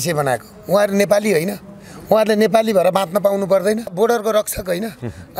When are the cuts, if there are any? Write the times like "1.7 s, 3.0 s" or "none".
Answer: 3.8 s